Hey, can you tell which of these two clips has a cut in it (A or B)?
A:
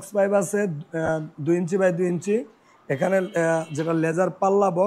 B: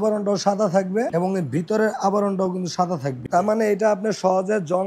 B